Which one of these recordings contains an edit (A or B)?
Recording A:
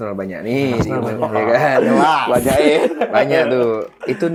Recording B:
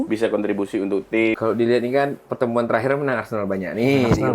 B